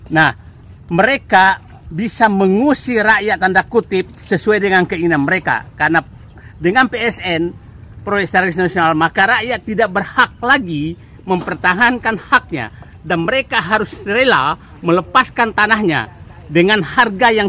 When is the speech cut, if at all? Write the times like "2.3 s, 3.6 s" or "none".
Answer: none